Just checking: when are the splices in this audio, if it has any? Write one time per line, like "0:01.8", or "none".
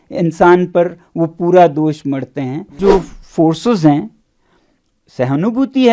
0:02.8